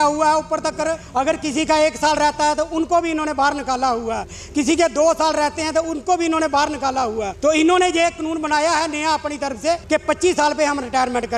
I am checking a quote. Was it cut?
yes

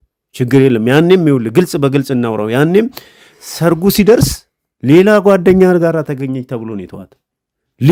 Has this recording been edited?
no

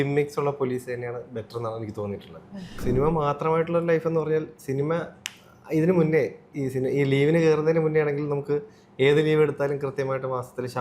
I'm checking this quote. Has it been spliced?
yes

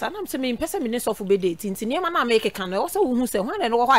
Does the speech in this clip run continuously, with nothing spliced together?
yes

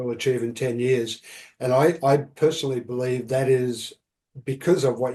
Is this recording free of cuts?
yes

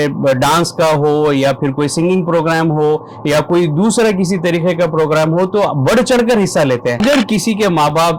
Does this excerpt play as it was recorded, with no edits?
no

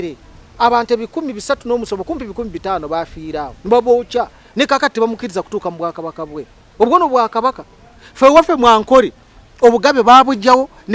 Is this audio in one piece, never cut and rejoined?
yes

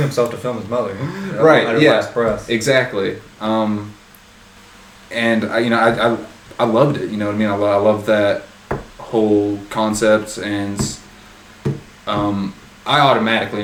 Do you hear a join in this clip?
no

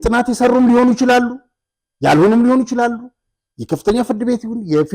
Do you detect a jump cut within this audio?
no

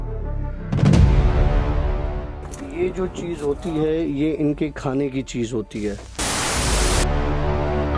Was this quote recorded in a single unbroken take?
yes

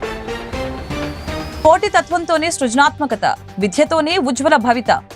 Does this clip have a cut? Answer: yes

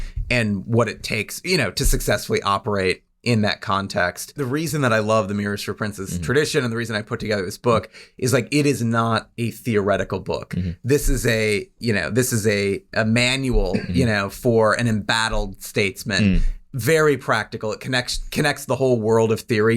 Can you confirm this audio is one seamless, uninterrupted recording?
no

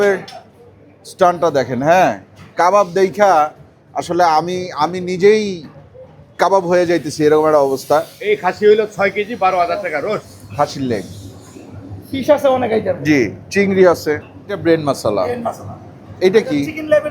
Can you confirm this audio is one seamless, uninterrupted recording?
no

